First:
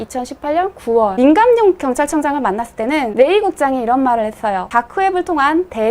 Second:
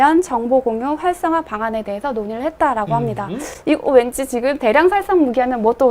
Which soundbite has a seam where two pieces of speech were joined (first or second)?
first